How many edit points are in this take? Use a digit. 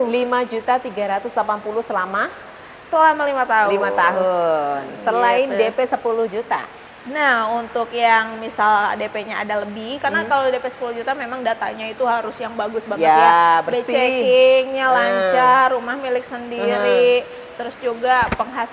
0